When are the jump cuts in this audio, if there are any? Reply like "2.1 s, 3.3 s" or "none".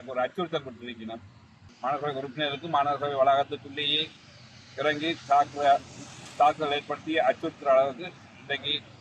1.6 s